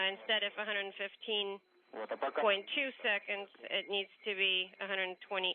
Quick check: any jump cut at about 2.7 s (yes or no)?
yes